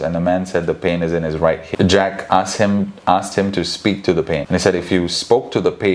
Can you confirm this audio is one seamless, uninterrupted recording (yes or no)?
no